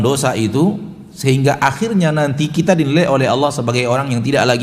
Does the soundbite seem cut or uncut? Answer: uncut